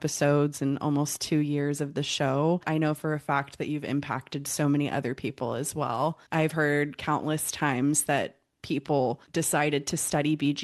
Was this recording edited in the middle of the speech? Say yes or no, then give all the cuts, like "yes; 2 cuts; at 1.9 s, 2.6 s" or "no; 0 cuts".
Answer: yes; 3 cuts; at 2.6 s, 6.2 s, 9.2 s